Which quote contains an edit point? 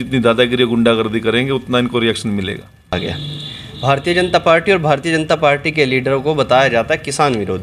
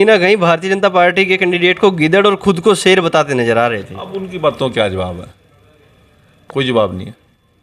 first; 1 cut; at 2.9 s

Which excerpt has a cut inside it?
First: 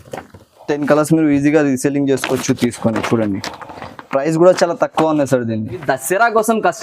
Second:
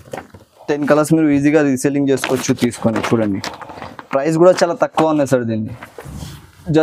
first; 1 cut; at 5.8 s

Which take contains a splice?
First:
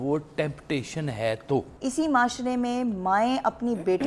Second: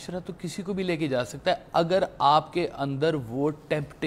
first; 1 cut; at 1.7 s

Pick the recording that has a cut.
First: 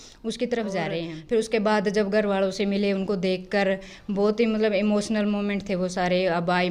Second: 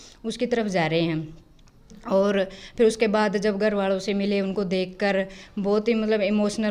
first; 1 cut; at 1.1 s

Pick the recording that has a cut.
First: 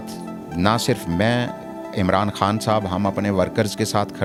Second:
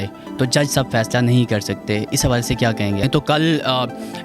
second; 1 cut; at 3.0 s

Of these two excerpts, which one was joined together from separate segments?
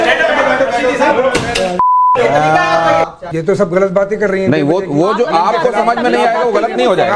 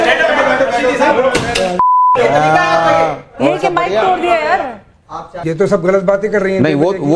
first; 1 cut; at 3.2 s

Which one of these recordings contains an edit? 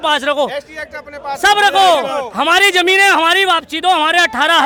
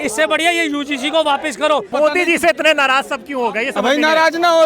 second; 1 cut; at 1.9 s

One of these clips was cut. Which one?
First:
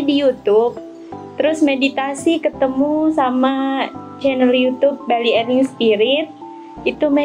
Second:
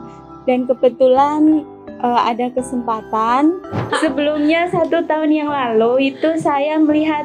second; 1 cut; at 3.9 s

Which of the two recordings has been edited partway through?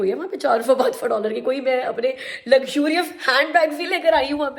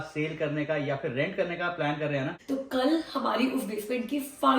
second; 1 cut; at 2.4 s

